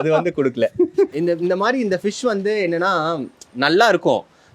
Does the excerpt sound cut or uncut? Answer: cut